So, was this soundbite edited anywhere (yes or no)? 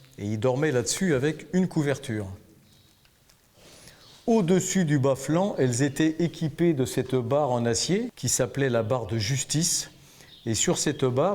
yes